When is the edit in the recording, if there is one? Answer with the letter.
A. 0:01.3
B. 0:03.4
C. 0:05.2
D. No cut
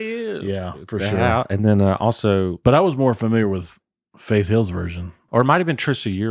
C